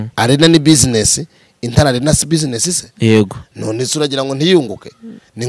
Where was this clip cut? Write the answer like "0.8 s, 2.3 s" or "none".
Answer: none